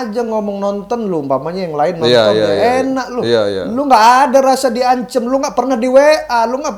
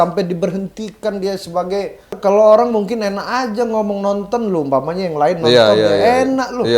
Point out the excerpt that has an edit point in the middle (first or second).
second